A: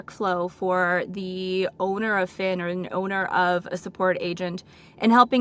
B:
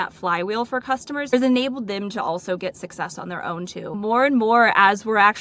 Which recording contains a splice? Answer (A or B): B